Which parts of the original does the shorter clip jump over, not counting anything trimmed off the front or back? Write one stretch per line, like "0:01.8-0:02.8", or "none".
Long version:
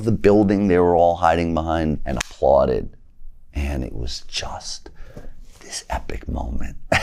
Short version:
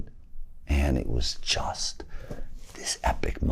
none